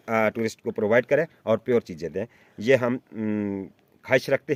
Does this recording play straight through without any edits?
yes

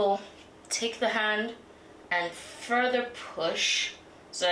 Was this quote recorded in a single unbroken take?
yes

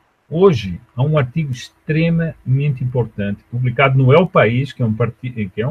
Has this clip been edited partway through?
no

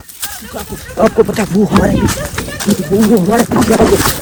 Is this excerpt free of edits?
yes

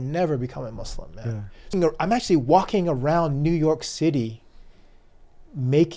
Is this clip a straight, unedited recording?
no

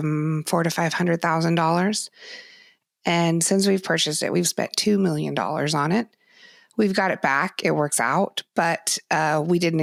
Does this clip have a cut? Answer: no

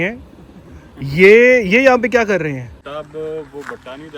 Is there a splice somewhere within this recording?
yes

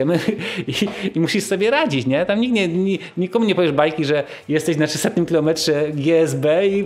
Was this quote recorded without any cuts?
yes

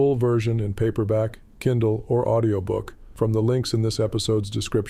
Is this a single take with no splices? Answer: no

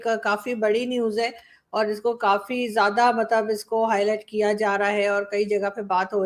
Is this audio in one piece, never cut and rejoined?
yes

